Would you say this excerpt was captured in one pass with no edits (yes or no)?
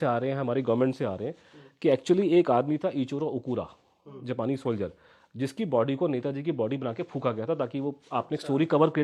yes